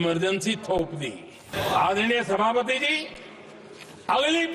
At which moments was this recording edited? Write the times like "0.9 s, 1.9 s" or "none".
1.5 s